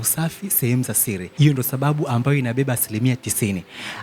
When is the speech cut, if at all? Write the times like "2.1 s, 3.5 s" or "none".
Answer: 1.3 s